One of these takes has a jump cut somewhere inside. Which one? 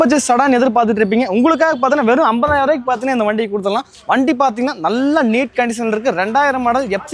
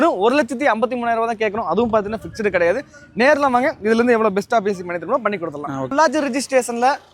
second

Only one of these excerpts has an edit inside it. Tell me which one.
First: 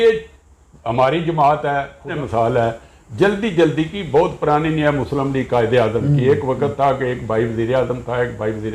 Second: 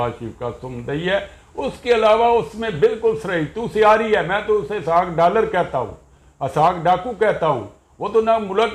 first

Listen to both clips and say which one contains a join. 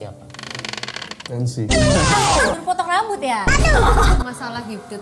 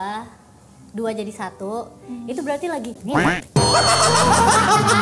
first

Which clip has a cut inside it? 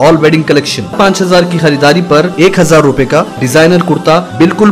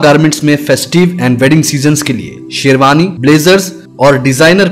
first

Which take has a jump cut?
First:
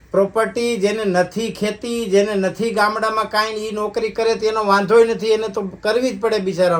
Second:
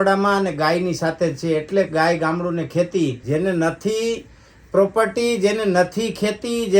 second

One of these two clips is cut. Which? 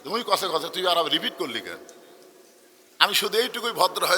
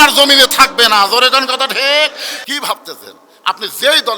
second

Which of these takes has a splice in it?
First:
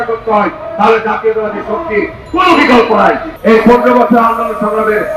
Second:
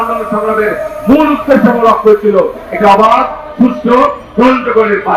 first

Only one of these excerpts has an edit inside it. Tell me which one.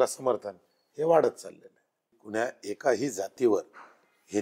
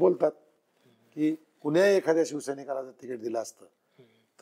first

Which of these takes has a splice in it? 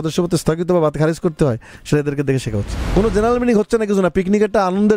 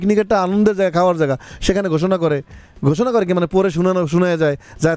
first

